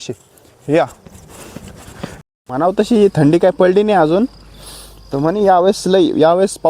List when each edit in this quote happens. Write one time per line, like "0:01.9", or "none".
0:02.2